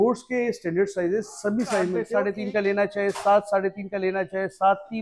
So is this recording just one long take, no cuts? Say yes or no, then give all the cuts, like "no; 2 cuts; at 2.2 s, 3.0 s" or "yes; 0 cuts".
no; 1 cut; at 2.0 s